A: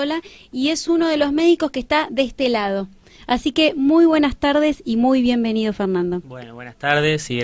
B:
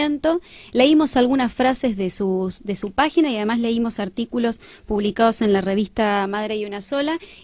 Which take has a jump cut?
A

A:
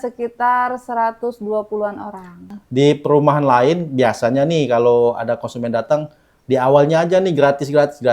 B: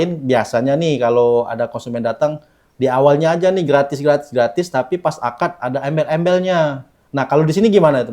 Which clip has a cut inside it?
A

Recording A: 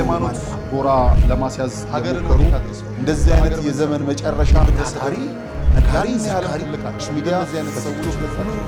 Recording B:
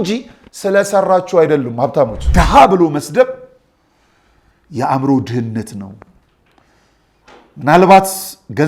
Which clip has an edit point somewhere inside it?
B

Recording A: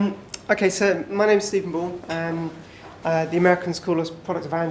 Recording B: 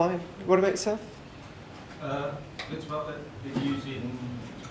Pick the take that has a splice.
B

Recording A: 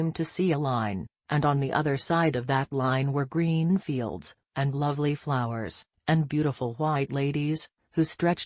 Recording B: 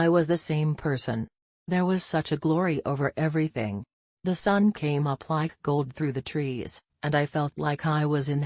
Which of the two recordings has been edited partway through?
B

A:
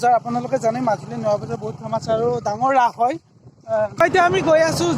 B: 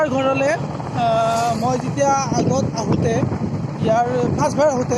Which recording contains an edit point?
A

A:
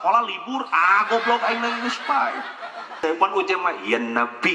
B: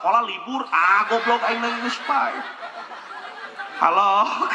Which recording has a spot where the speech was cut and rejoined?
A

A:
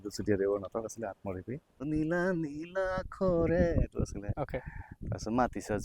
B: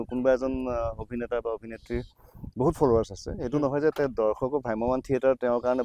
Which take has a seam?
A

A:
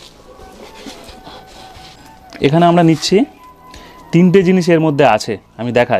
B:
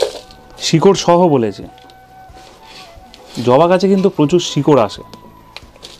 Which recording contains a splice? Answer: A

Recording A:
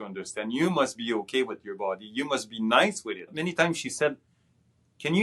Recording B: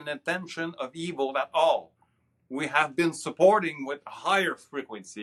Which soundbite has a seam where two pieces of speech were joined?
A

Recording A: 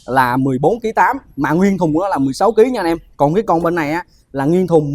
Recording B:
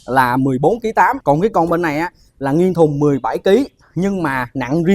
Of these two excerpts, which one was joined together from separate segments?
B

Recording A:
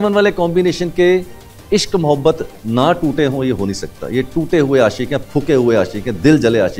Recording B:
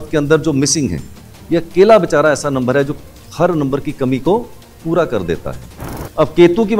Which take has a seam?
B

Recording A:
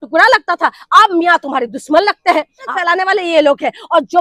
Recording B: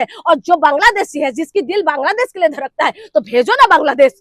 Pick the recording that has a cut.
A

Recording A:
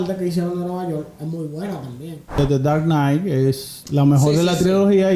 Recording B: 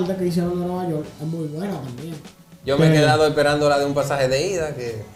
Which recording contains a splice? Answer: A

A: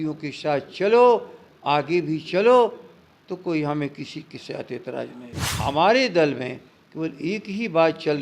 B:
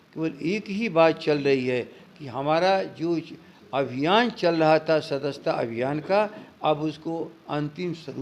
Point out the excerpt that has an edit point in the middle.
A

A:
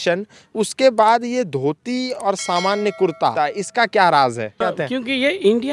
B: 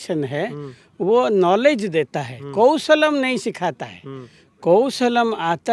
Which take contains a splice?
A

